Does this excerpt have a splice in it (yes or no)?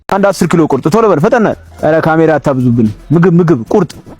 yes